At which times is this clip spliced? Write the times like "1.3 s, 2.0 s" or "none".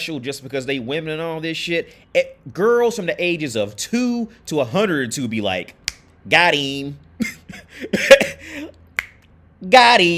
none